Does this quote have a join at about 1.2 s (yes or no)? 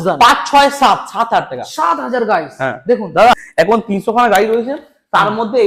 no